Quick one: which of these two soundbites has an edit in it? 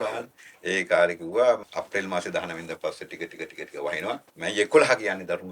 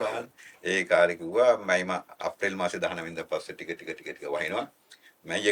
first; 2 cuts; at 1.6 s, 4.3 s

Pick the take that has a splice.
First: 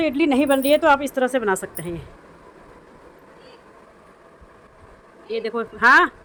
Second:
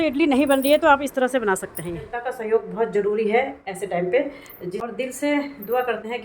second; 2 cuts; at 2.3 s, 4.9 s

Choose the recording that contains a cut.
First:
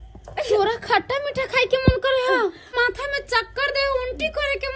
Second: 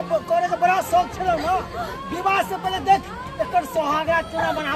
first; 1 cut; at 2.7 s

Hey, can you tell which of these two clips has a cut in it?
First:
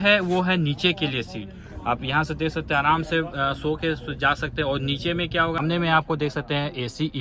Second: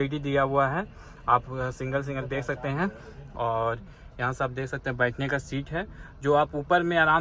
first; 1 cut; at 5.6 s

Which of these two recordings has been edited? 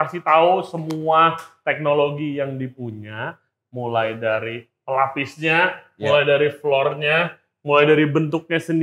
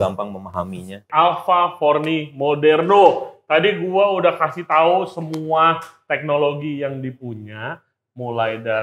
second; 1 cut; at 1.1 s

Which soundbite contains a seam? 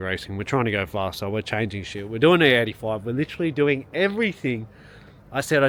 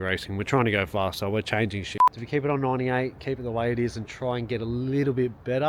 second; 1 cut; at 1.9 s

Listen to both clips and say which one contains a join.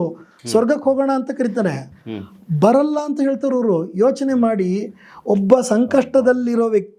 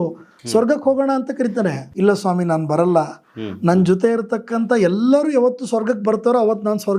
second; 1 cut; at 1.8 s

